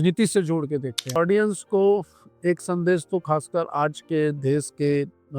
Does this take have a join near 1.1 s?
yes; 1 cut; at 1.1 s

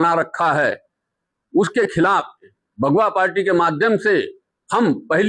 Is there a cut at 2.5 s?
yes; 1 cut; at 2.5 s

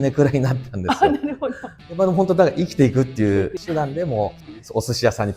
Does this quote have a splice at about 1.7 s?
yes; 2 cuts; at 1.7 s, 3.6 s

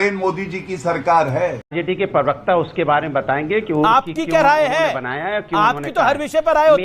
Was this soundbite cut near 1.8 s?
yes; 1 cut; at 1.8 s

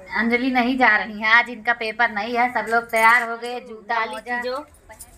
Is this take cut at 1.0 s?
no; 1 cut; at 4.2 s

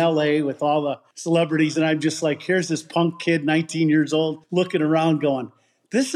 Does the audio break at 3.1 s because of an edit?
no; 2 cuts; at 1.1 s, 4.4 s

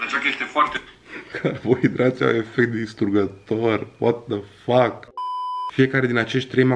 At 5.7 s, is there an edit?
yes; 1 cut; at 5.7 s

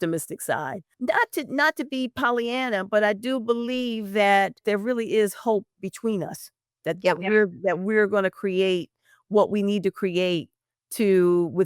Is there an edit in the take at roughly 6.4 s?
no; 2 cuts; at 0.9 s, 4.6 s

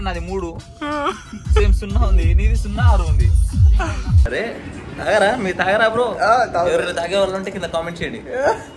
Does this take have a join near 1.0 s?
no; 1 cut; at 4.2 s

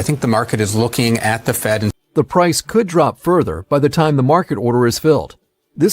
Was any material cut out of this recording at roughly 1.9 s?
yes; 1 cut; at 1.9 s

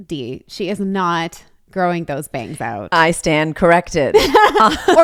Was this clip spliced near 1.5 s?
no; 0 cuts

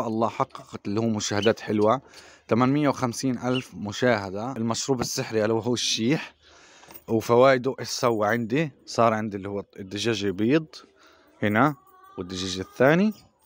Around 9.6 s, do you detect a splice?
no; 1 cut; at 4.5 s

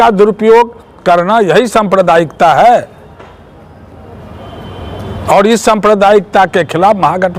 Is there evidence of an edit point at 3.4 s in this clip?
no; 0 cuts

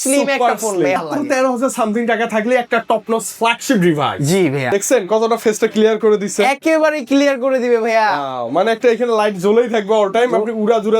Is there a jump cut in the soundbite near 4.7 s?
yes; 2 cuts; at 0.9 s, 4.7 s

